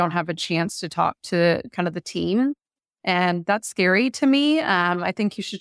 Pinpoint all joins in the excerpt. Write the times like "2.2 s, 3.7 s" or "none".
none